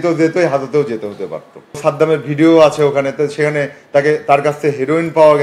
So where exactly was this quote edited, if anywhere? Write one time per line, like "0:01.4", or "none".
0:01.8